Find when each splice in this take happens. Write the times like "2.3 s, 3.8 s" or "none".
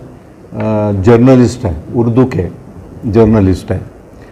none